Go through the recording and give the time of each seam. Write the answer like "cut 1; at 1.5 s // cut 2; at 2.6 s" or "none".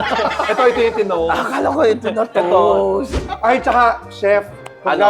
cut 1; at 3.2 s

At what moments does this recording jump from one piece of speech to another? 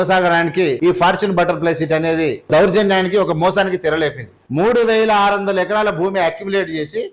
cut 1; at 0.8 s // cut 2; at 2.5 s // cut 3; at 4.4 s

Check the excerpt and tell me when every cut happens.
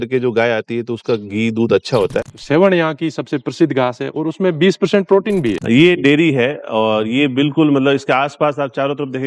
cut 1; at 2.3 s // cut 2; at 5.6 s

